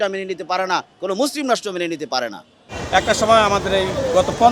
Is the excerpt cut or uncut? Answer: cut